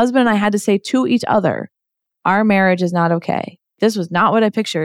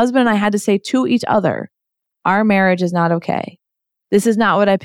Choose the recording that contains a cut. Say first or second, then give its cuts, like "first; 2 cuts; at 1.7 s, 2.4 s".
first; 1 cut; at 3.8 s